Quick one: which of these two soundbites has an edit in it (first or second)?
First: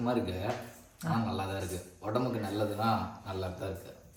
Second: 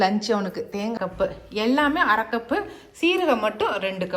second